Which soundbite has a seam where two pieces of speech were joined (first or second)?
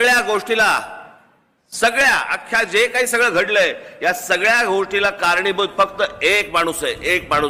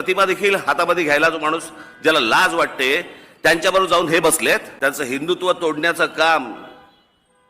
second